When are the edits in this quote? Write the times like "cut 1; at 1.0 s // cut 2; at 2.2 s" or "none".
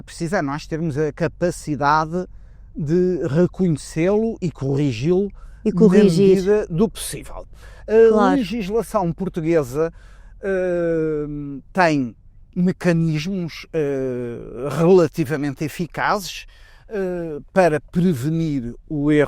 none